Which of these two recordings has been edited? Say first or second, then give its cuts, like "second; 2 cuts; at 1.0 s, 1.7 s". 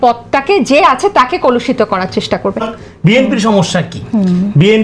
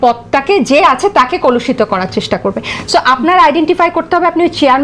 first; 1 cut; at 2.8 s